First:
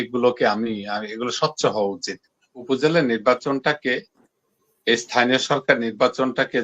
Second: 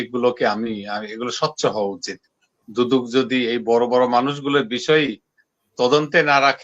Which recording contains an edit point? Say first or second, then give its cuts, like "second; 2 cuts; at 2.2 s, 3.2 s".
first; 1 cut; at 2.5 s